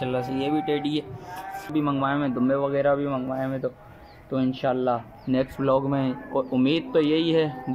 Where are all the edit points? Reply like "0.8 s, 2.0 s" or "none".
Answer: 1.7 s

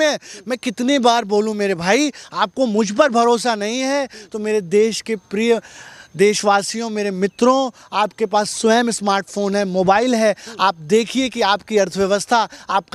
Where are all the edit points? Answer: none

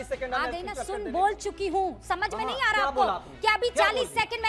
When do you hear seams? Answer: none

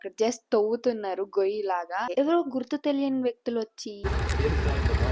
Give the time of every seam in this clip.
2.1 s, 4.1 s

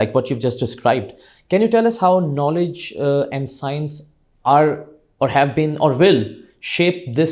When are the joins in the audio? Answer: none

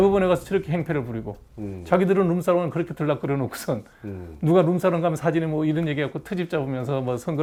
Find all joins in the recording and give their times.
none

